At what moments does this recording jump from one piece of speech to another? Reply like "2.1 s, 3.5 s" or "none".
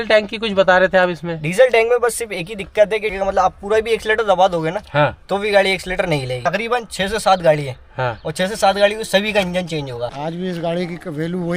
3.1 s, 6.4 s, 10.1 s

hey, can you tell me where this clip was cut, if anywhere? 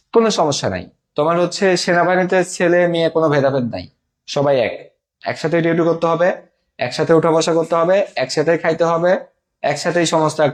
none

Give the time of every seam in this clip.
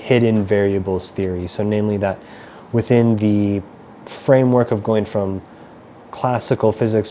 none

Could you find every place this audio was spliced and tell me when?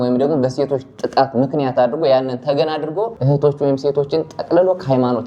3.2 s

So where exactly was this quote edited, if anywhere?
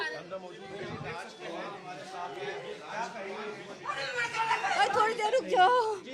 4.7 s

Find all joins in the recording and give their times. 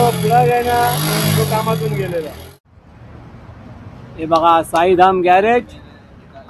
2.5 s

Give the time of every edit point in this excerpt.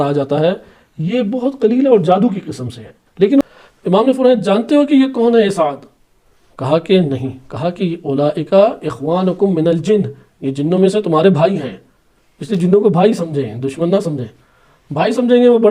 3.5 s

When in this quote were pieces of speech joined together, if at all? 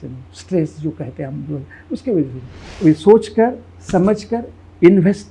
2.6 s

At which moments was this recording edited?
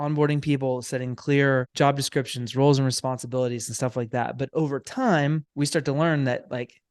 1.7 s, 5.5 s

